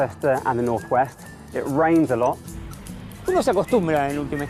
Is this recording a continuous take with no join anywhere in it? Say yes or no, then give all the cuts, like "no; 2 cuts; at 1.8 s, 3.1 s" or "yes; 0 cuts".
yes; 0 cuts